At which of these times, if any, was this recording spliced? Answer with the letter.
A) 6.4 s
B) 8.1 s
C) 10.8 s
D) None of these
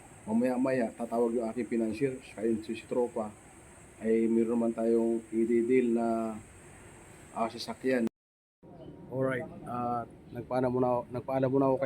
B